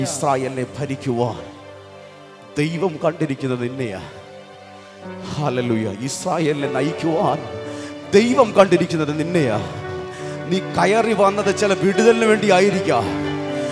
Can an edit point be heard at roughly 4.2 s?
no; 0 cuts

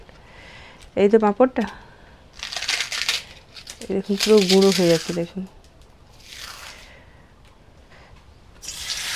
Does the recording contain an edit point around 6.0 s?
no; 1 cut; at 7.9 s

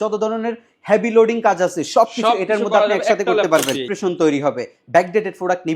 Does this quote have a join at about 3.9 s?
yes; 1 cut; at 3.9 s

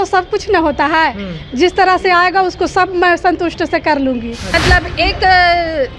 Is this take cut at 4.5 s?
yes; 1 cut; at 4.5 s

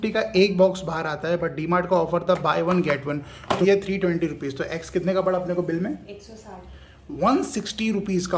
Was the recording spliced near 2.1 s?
no; 1 cut; at 3.6 s

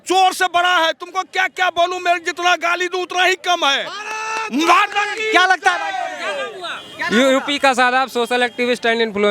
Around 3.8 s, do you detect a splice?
no; 0 cuts

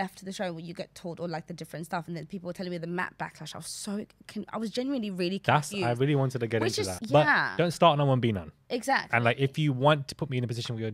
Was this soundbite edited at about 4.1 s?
no; 1 cut; at 6.9 s

